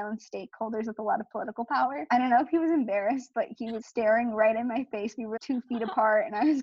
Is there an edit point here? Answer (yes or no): yes